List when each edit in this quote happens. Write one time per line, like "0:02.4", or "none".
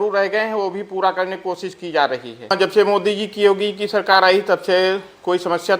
0:02.3